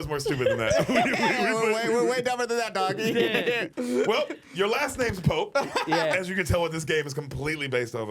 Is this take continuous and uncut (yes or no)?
no